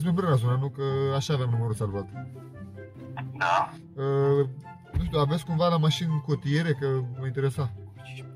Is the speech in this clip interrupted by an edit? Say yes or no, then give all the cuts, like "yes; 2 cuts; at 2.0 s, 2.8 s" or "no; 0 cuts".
no; 0 cuts